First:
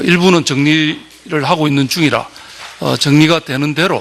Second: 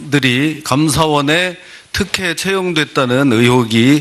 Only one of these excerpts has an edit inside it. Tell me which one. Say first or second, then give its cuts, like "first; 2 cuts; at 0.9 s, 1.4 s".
second; 1 cut; at 3.0 s